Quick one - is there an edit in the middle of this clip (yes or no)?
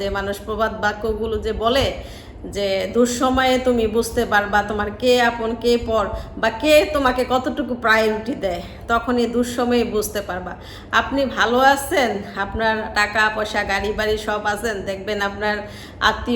no